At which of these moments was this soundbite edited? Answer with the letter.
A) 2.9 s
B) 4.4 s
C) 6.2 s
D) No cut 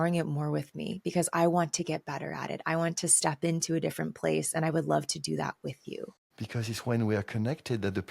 C